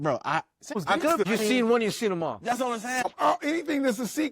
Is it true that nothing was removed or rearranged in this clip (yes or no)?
no